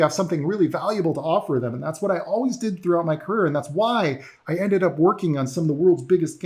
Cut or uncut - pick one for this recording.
uncut